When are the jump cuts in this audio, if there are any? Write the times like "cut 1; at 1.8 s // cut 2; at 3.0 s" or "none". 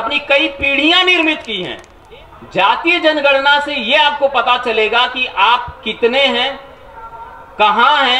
cut 1; at 1.9 s

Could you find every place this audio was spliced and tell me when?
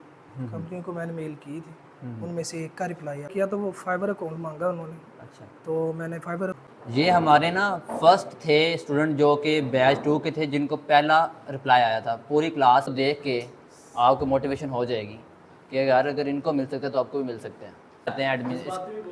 cut 1; at 3.3 s // cut 2; at 6.5 s // cut 3; at 12.9 s // cut 4; at 18.1 s

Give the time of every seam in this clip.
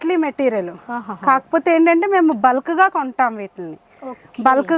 none

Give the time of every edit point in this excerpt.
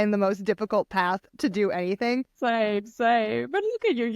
cut 1; at 2.3 s

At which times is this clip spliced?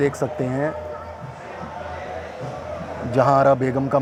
none

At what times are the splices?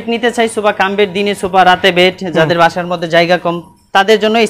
none

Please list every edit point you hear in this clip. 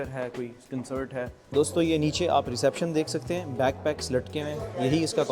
cut 1; at 1.4 s

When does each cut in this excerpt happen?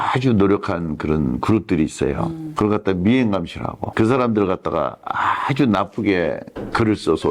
cut 1; at 3.8 s

